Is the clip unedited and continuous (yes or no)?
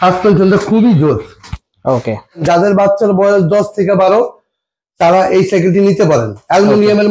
no